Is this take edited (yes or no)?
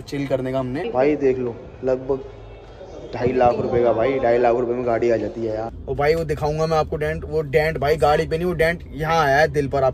yes